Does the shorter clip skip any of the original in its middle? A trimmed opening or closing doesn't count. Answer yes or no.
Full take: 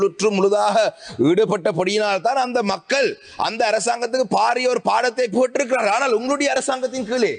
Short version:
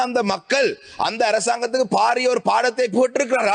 no